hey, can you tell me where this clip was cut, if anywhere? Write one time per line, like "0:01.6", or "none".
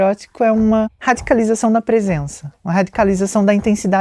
0:00.9